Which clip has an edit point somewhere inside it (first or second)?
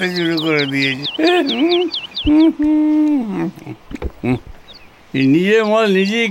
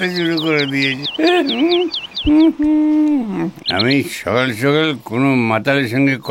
second